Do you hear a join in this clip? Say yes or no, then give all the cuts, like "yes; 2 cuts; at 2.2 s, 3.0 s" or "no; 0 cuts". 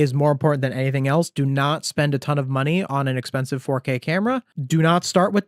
no; 0 cuts